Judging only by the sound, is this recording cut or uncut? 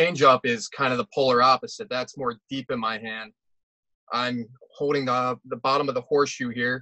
uncut